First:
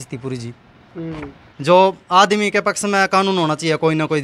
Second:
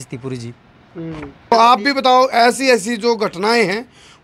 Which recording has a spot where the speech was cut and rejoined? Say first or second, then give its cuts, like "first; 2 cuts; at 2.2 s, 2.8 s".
first; 1 cut; at 1.3 s